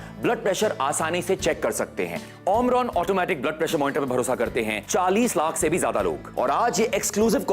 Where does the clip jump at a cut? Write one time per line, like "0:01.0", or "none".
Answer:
0:02.2
0:04.8
0:06.3